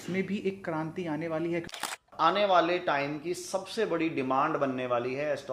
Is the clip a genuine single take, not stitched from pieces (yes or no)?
no